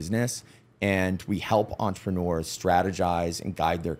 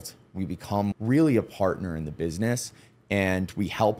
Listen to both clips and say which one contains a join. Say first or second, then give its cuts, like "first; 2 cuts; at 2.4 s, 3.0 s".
second; 1 cut; at 0.9 s